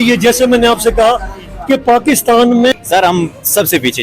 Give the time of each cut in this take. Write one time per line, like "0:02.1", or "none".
0:02.7